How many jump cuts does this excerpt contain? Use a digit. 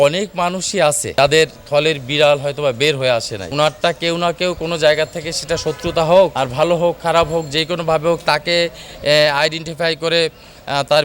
3